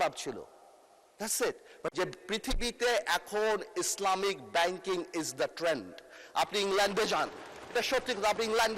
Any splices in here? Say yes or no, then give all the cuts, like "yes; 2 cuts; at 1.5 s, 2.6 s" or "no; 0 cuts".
yes; 1 cut; at 1.9 s